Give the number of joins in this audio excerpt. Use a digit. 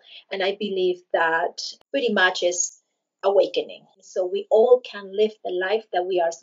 1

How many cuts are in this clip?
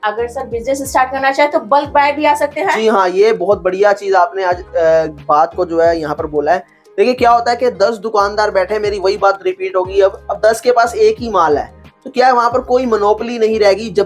0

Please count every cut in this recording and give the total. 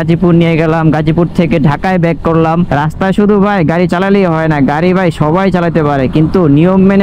1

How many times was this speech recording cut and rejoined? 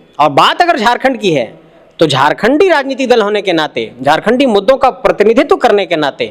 0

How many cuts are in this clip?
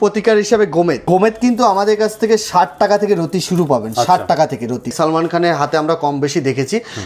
2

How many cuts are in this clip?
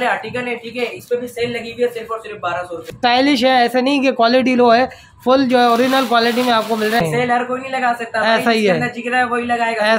2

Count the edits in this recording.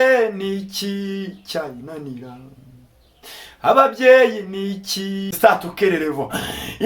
1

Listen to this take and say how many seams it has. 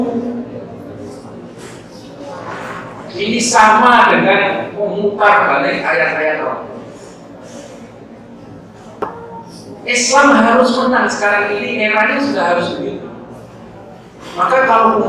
1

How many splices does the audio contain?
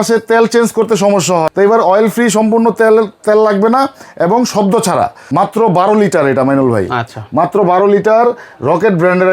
2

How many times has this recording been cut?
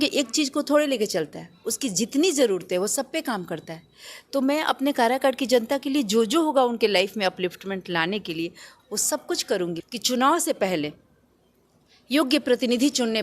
1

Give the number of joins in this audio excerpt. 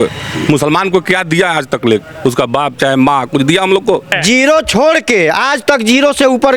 1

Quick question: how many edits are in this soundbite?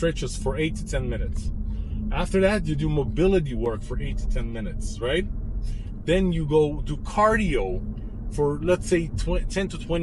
0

